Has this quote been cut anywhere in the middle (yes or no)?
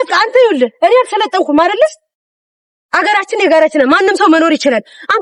no